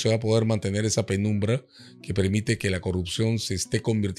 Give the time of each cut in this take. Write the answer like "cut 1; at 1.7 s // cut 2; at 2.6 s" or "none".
none